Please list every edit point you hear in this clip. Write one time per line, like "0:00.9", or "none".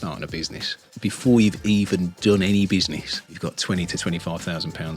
0:00.9
0:03.1